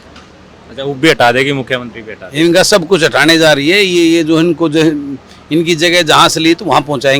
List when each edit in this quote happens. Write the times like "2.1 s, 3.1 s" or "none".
none